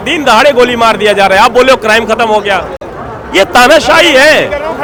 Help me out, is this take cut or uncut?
uncut